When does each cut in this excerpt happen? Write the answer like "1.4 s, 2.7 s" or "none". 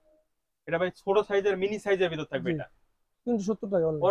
none

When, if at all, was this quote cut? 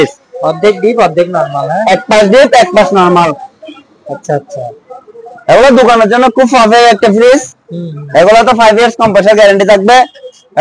none

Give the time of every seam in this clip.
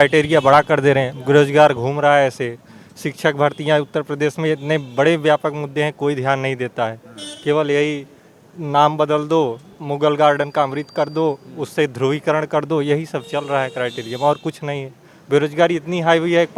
none

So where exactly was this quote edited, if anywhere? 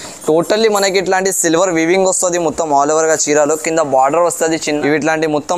4.6 s

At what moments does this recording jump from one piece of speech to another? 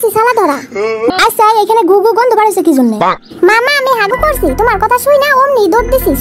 1.1 s

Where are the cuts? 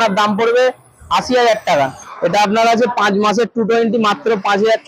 2.0 s

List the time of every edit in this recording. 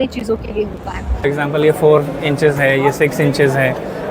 1.2 s

